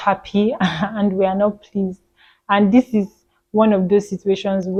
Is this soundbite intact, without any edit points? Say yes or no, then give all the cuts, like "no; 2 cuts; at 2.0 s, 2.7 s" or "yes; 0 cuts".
yes; 0 cuts